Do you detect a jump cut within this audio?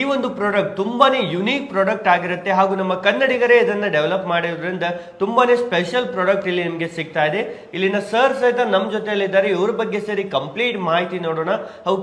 no; 0 cuts

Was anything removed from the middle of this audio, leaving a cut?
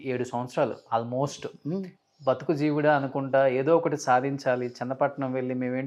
no; 0 cuts

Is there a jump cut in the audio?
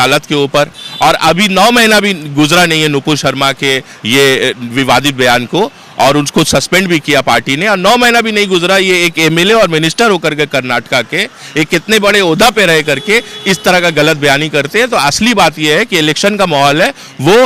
no; 0 cuts

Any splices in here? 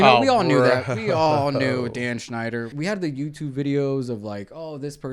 yes; 1 cut; at 2.7 s

